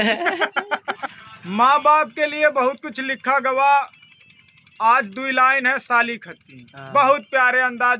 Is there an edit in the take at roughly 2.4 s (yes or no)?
no